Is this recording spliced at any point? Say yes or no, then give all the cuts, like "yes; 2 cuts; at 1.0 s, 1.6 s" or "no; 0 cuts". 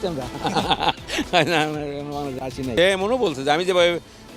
yes; 1 cut; at 2.7 s